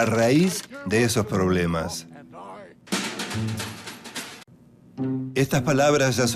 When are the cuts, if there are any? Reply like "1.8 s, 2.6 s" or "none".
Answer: none